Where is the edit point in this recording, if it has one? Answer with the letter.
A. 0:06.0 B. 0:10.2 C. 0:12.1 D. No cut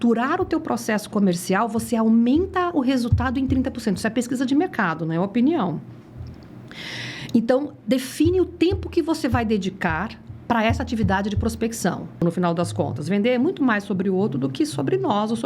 C